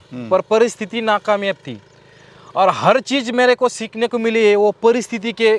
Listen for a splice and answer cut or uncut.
uncut